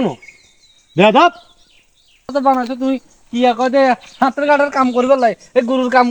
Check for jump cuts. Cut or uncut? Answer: cut